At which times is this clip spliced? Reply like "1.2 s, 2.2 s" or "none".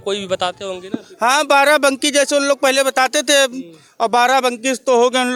none